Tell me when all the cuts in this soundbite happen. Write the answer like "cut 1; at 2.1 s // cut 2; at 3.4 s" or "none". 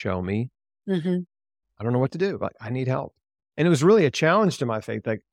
cut 1; at 3.4 s